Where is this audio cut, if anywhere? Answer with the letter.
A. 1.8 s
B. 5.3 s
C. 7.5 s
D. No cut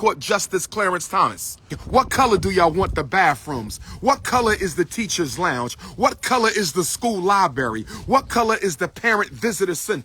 A